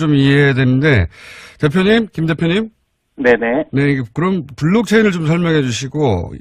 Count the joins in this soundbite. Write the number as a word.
one